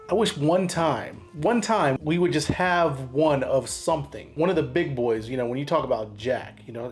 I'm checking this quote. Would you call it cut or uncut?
cut